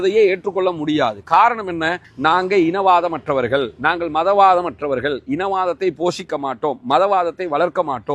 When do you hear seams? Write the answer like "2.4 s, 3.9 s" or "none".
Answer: 2.0 s